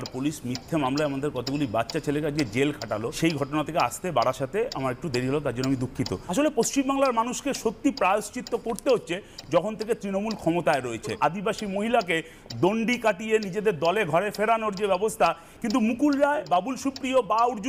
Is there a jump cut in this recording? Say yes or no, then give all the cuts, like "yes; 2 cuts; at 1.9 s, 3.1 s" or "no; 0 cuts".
yes; 5 cuts; at 3.1 s, 6.2 s, 11.2 s, 15.4 s, 16.4 s